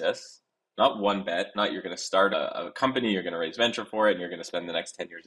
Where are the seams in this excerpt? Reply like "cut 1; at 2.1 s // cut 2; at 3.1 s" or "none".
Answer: cut 1; at 2.3 s